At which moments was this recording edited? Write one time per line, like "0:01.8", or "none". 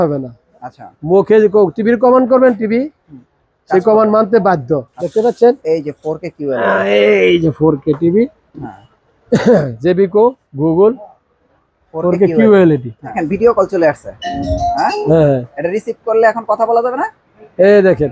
0:05.0
0:13.2